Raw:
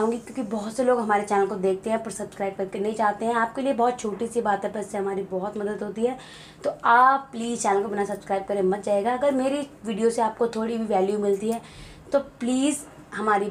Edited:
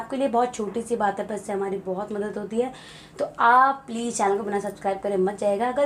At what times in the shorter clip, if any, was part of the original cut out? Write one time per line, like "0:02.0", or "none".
none